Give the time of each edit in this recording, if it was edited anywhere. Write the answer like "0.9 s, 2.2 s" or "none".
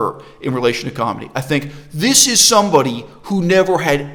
none